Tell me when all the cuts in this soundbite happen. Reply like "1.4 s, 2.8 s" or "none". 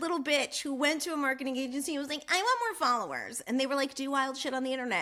none

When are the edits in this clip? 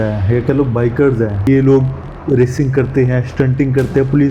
1.5 s

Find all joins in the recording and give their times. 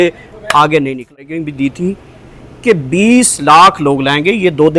1.2 s

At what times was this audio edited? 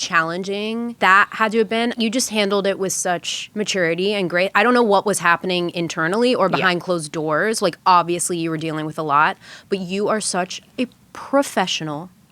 1.0 s, 1.9 s, 3.4 s

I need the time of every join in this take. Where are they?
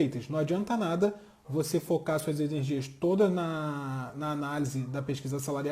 none

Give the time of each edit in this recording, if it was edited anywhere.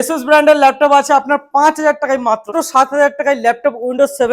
2.5 s

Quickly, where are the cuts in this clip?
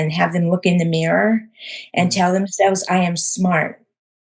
none

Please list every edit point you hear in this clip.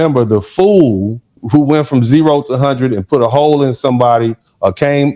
1.4 s

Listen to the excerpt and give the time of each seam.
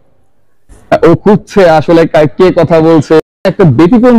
3.3 s

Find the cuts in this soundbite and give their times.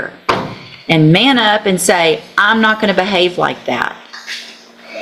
none

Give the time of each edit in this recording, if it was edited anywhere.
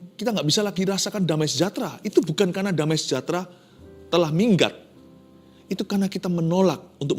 3.2 s

